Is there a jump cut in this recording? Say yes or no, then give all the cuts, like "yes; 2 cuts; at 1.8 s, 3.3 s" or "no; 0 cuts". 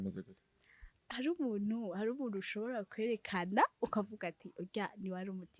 no; 0 cuts